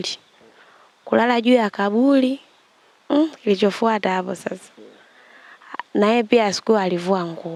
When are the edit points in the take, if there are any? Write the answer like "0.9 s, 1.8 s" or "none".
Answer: none